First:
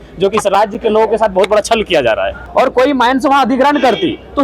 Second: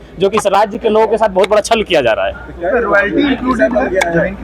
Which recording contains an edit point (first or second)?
first